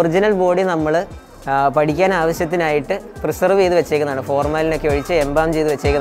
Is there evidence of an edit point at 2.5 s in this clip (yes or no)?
no